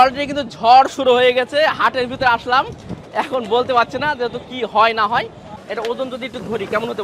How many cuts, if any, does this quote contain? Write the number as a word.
one